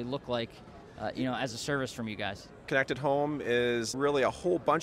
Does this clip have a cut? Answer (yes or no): yes